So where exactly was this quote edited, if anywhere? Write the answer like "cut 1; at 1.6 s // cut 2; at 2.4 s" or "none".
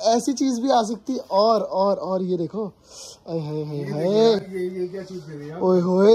none